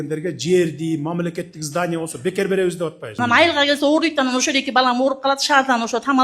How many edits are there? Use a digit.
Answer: 1